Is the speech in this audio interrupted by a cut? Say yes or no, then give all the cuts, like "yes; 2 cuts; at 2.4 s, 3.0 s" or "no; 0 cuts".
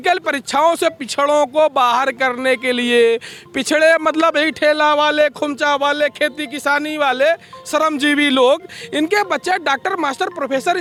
no; 0 cuts